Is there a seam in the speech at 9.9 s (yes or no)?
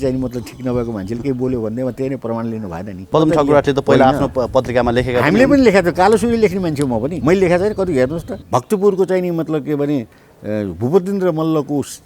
no